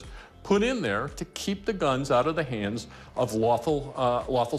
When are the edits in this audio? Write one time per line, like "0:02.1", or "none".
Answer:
none